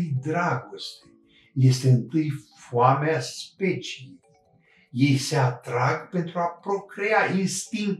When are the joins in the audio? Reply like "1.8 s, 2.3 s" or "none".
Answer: none